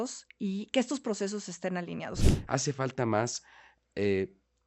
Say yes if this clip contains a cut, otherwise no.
yes